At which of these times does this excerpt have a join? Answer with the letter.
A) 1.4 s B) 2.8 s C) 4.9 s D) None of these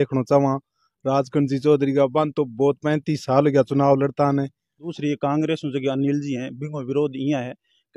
C